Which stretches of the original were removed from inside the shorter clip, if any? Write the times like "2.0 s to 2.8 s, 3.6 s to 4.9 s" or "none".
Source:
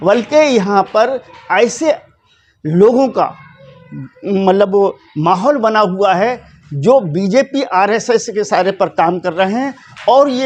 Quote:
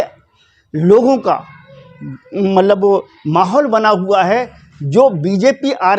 none